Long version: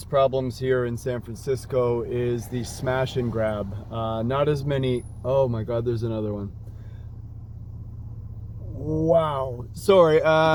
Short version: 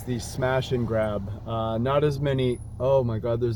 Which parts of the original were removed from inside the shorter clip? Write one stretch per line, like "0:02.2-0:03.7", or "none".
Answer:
none